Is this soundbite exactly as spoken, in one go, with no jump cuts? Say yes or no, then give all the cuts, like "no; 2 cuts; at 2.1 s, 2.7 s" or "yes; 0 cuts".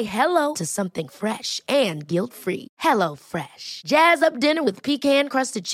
yes; 0 cuts